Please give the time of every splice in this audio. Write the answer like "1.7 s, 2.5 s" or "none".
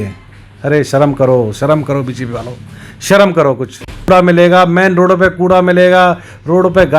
4.1 s